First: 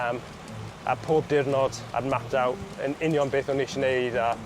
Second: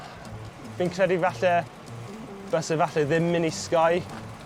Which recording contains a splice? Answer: first; 1 cut; at 1.8 s

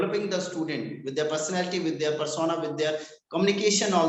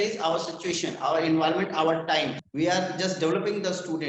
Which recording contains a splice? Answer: second; 1 cut; at 2.4 s

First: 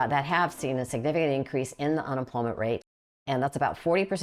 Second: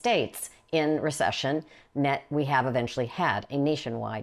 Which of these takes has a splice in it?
first; 1 cut; at 3.2 s

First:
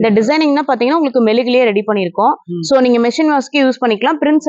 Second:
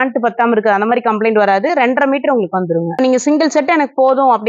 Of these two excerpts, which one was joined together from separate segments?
second; 1 cut; at 3.0 s

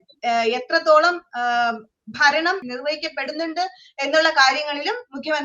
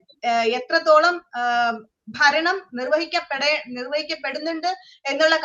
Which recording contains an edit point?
first; 1 cut; at 2.6 s

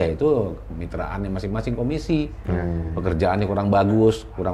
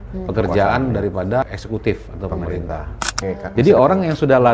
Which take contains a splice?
second; 2 cuts; at 1.4 s, 3.2 s

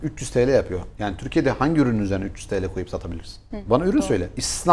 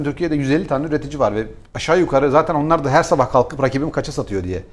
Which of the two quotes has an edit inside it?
first; 1 cut; at 3.6 s

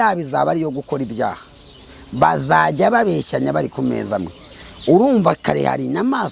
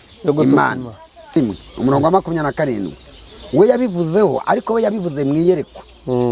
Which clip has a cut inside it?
second; 1 cut; at 1.3 s

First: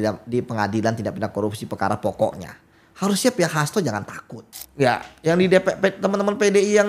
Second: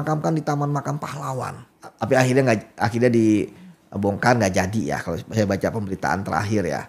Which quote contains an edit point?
first; 1 cut; at 4.6 s

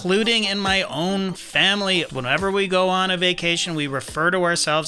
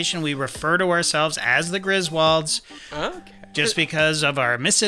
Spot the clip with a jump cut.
first; 1 cut; at 2.1 s

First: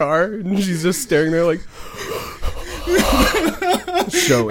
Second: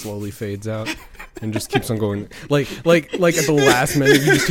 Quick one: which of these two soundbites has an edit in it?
first; 1 cut; at 2.9 s

